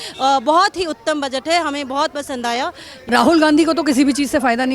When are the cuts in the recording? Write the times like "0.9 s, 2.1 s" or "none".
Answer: 3.1 s